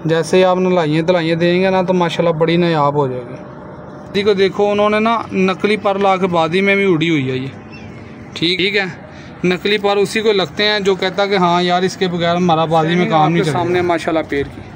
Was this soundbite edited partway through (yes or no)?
yes